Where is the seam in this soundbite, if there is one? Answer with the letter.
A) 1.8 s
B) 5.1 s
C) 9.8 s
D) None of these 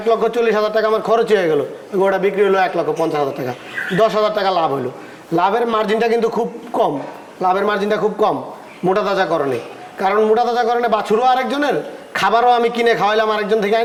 D